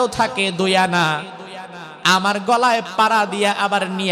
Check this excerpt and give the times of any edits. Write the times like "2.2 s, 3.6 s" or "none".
none